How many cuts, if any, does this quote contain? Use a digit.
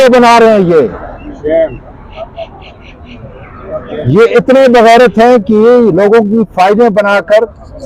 0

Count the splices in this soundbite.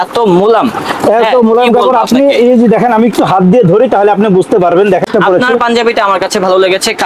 1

